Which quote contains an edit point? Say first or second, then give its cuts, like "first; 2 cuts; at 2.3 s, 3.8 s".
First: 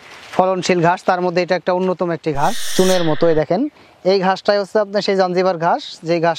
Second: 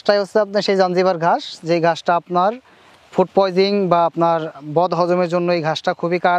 first; 1 cut; at 2.6 s